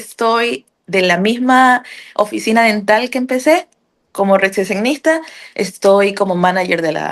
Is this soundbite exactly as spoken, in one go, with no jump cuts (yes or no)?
yes